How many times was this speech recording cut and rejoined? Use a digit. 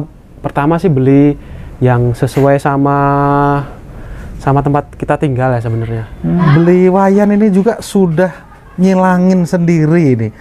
1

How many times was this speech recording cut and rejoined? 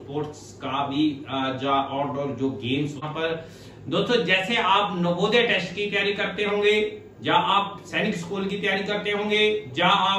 1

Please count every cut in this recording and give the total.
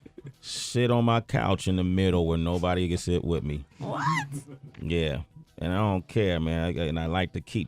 1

